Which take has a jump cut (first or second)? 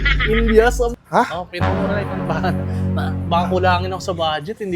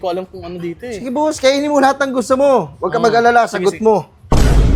first